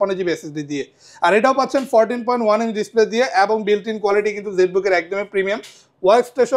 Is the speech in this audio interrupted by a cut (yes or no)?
no